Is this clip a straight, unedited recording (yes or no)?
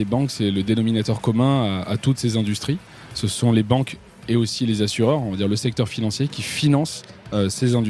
yes